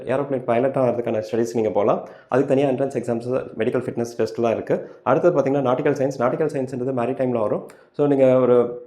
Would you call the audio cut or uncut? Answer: uncut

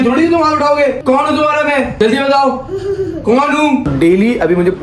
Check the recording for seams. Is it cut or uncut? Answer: cut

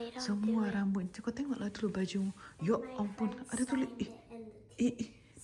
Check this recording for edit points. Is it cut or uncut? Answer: uncut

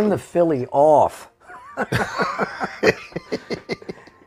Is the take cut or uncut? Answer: uncut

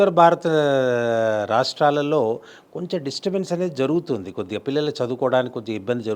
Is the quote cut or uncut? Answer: uncut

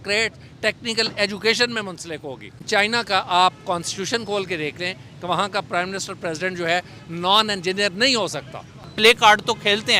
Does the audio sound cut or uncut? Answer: cut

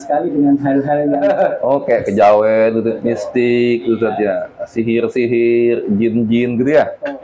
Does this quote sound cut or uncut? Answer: uncut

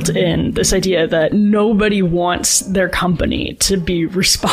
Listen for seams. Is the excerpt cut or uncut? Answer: uncut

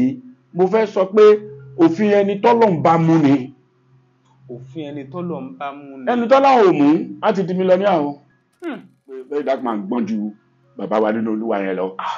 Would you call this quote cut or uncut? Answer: cut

